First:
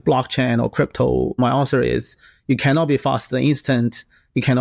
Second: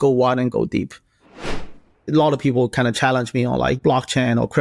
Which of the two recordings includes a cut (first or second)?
second